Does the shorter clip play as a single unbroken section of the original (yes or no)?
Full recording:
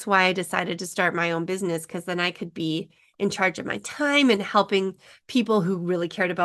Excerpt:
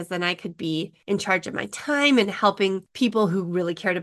no